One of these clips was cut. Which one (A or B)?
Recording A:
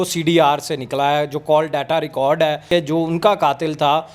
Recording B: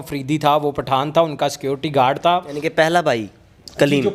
A